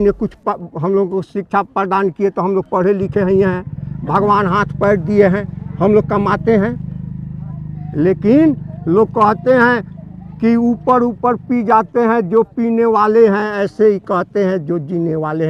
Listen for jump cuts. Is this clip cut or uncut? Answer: uncut